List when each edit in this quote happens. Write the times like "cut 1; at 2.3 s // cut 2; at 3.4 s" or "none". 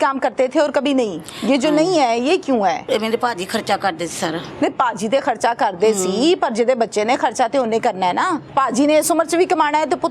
cut 1; at 2.8 s // cut 2; at 8.5 s